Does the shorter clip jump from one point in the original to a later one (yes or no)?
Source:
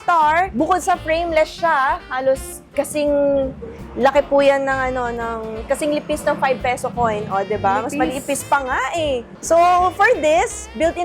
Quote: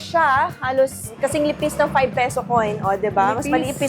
yes